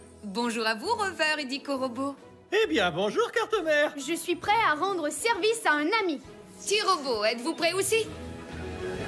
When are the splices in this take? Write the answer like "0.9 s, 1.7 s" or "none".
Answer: 8.2 s